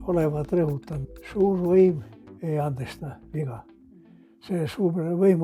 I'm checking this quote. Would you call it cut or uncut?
cut